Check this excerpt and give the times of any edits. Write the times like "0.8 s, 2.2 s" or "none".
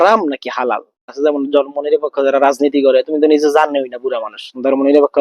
1.1 s

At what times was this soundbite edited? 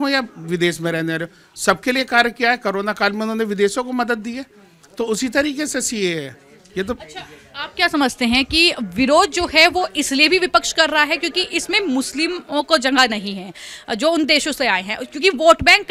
none

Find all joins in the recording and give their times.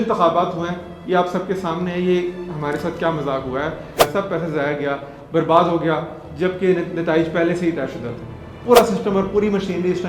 3.8 s, 8.6 s

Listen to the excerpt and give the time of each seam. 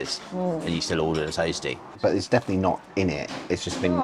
1.9 s

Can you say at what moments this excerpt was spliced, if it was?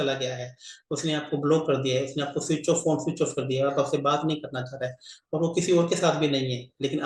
none

